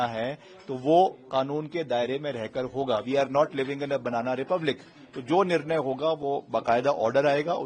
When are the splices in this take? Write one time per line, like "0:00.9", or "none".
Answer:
none